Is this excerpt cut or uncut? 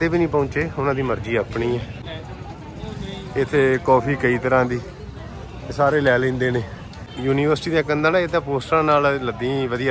cut